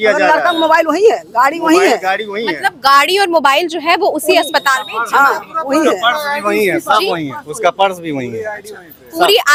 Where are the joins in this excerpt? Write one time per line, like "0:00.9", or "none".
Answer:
none